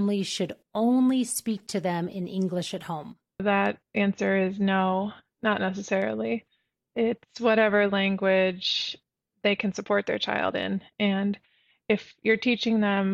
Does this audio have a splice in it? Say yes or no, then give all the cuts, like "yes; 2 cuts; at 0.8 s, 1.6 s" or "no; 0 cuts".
yes; 1 cut; at 3.4 s